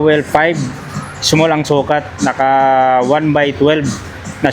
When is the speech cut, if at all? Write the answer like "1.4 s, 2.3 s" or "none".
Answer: none